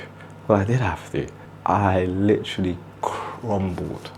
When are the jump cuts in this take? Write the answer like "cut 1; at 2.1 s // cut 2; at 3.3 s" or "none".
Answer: cut 1; at 1.3 s